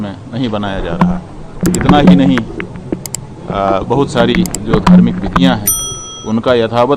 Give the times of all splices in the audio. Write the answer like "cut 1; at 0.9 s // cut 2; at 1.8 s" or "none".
cut 1; at 1.6 s